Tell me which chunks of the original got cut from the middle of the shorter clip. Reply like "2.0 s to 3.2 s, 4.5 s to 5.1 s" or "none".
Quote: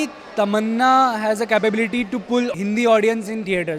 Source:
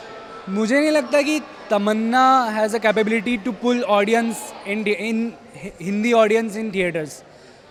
3.8 s to 5.8 s